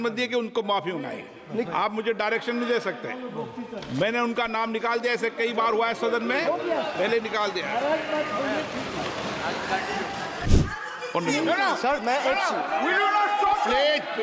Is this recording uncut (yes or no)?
no